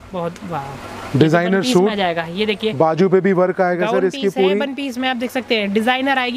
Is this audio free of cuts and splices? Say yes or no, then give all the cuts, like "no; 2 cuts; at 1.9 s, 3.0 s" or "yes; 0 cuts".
yes; 0 cuts